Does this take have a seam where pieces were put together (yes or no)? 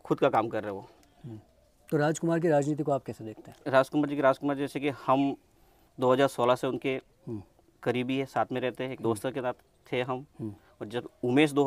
no